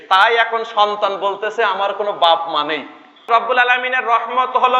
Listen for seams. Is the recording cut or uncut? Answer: cut